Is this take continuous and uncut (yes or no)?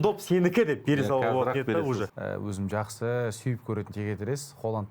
no